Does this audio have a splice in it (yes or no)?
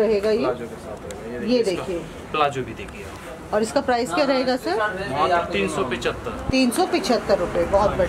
no